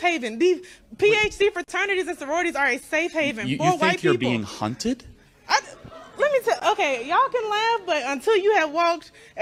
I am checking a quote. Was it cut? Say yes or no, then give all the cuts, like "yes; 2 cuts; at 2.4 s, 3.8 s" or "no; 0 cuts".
no; 0 cuts